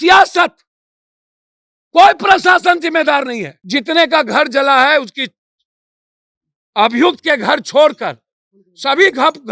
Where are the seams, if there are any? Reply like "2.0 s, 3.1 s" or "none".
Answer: 3.5 s